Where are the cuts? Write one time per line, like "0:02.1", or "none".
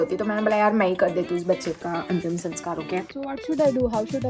0:03.1